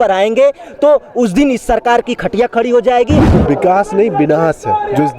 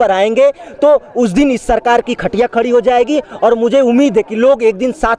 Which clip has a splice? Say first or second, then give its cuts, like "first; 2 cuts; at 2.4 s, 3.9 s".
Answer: first; 1 cut; at 3.3 s